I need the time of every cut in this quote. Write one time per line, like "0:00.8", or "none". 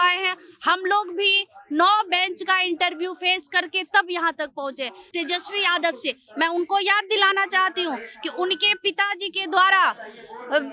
0:05.0